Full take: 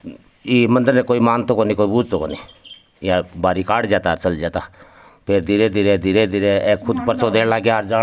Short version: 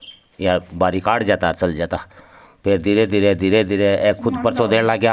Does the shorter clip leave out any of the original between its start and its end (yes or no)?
no